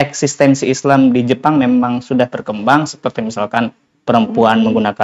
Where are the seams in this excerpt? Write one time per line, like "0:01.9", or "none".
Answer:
none